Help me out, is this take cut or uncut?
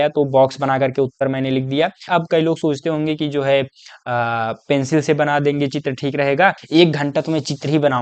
cut